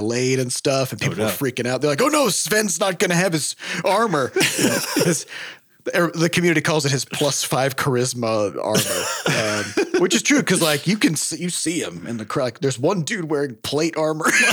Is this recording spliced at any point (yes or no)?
no